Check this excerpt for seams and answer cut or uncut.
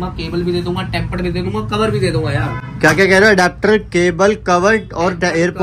uncut